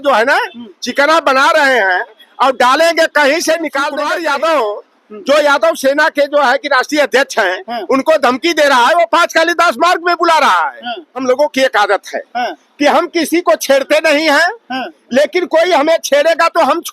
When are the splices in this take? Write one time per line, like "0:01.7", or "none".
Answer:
0:03.9
0:11.2